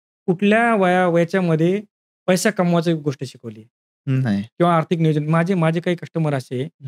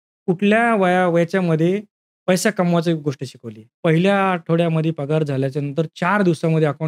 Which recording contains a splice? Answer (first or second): second